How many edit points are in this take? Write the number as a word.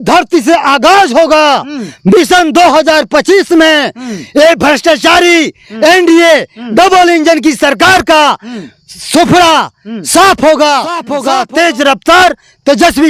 one